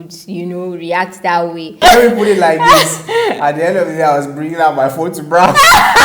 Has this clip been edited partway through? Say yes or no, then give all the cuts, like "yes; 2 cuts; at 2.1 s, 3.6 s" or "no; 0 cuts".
yes; 1 cut; at 1.8 s